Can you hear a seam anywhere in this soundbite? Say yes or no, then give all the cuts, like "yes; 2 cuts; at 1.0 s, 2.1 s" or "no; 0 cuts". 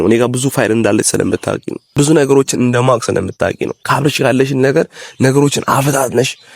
yes; 2 cuts; at 1.8 s, 3.7 s